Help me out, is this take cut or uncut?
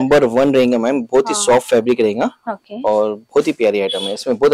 uncut